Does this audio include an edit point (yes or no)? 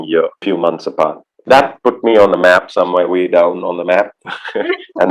no